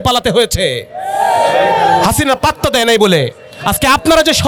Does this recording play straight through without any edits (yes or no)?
yes